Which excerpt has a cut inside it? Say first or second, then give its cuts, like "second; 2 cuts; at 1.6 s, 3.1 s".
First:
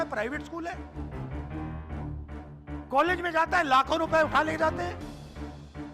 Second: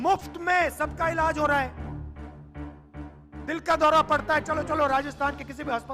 first; 3 cuts; at 0.8 s, 2.4 s, 4.9 s